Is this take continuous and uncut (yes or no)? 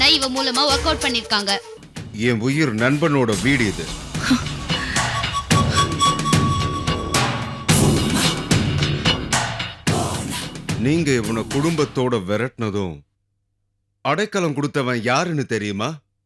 no